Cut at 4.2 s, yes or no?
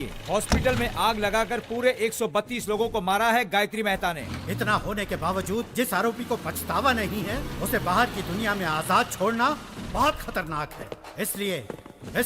yes